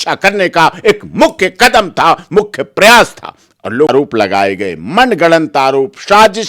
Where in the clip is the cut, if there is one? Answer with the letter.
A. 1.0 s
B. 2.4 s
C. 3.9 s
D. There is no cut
C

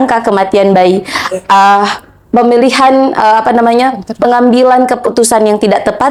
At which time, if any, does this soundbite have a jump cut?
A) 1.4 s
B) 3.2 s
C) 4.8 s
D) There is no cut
D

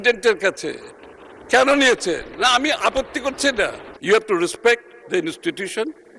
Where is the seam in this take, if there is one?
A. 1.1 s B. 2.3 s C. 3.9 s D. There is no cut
C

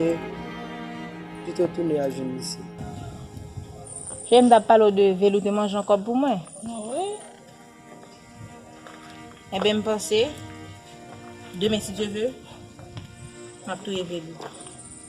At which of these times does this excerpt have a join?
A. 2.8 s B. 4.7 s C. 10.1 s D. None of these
A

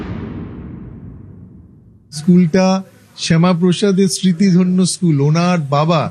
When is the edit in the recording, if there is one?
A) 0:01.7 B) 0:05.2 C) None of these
A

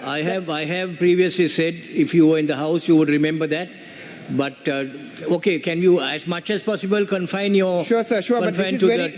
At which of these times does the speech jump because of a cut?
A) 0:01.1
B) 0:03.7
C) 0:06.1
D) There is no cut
D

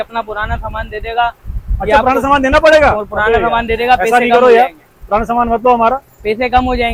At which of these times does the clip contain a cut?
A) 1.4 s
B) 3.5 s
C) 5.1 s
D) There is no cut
D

